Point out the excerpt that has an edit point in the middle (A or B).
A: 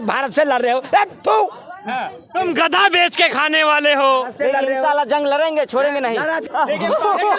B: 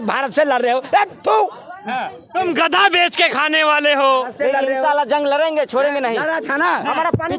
A